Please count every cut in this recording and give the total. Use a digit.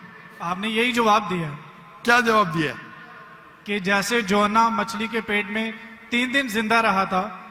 0